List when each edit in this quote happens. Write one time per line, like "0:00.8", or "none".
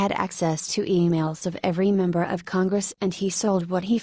0:02.5